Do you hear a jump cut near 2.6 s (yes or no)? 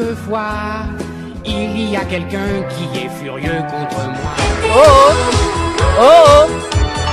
no